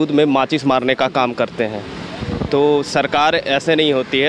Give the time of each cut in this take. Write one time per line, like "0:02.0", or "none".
none